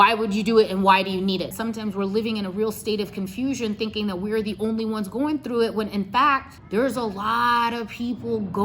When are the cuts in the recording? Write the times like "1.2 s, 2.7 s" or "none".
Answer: 1.5 s, 6.6 s